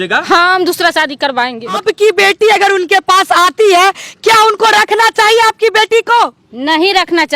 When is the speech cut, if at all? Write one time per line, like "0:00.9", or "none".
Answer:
0:01.8
0:06.5